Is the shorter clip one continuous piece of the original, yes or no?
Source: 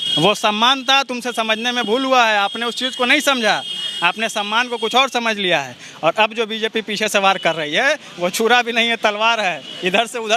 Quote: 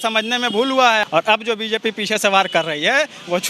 no